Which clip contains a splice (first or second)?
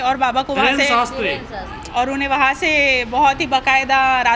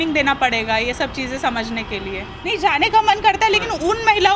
second